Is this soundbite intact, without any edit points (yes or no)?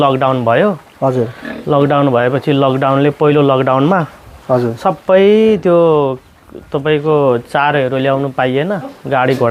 yes